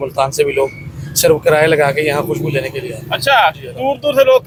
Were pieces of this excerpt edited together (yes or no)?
no